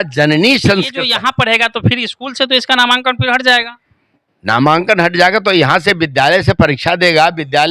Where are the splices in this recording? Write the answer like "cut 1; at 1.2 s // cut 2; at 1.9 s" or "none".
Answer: cut 1; at 1.0 s

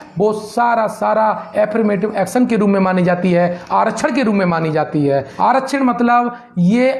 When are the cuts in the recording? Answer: cut 1; at 5.3 s

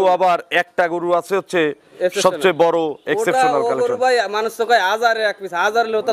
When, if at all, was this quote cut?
none

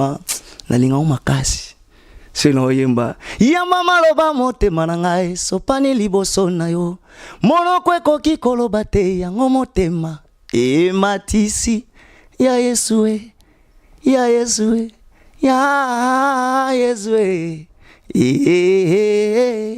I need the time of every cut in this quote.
none

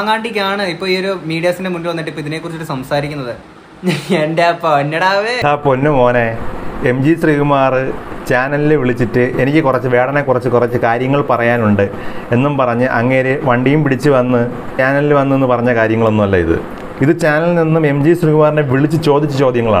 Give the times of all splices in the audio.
cut 1; at 14.7 s

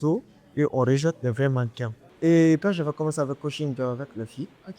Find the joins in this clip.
cut 1; at 2.1 s

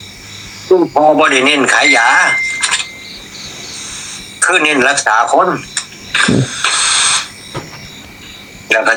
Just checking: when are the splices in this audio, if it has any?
none

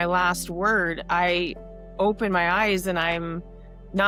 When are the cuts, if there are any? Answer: none

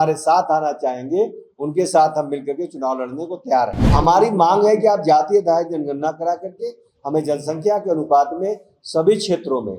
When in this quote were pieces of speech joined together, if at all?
cut 1; at 3.8 s

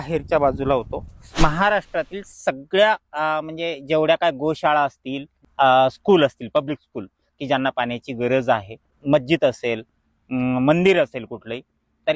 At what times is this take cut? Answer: cut 1; at 1.3 s // cut 2; at 5.4 s // cut 3; at 9.0 s

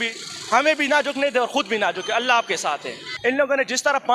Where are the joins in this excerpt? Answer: cut 1; at 3.1 s

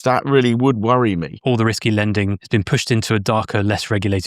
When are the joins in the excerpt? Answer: cut 1; at 1.3 s // cut 2; at 2.4 s

